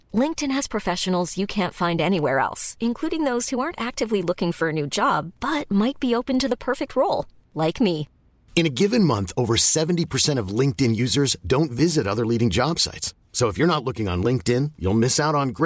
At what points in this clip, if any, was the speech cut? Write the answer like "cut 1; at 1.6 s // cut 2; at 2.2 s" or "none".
none

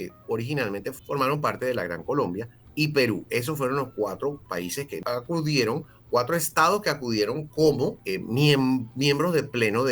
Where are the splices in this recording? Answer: cut 1; at 1.0 s // cut 2; at 5.0 s // cut 3; at 8.0 s

